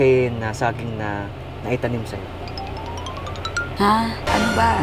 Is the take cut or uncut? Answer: uncut